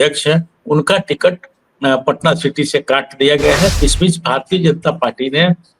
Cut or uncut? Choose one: cut